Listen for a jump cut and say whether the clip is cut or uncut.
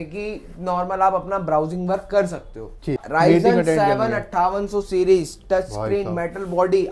cut